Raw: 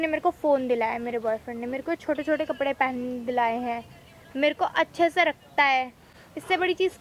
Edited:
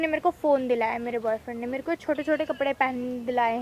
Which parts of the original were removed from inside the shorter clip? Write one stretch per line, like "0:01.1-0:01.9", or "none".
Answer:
none